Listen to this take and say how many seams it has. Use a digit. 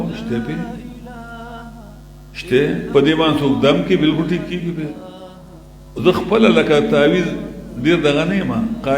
1